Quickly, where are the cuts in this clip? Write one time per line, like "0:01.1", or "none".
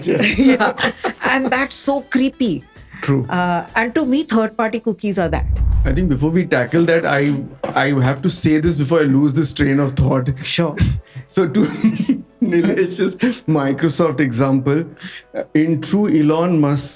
0:05.7